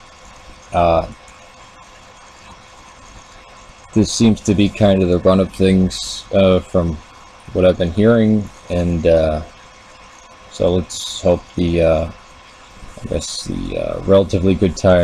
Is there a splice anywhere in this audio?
yes; 1 cut; at 5.3 s

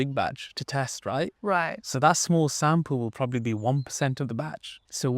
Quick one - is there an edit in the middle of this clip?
no; 0 cuts

